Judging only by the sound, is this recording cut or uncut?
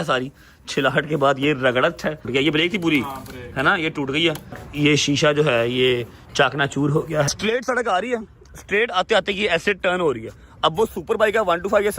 cut